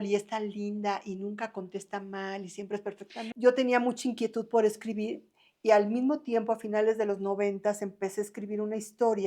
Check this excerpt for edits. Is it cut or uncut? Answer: cut